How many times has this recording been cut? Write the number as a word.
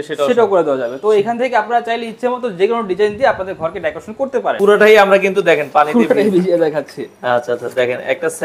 one